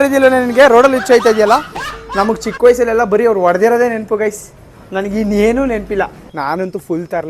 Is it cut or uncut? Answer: cut